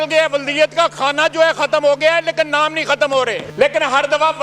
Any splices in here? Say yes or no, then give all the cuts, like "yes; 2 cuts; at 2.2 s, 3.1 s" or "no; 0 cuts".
yes; 1 cut; at 3.5 s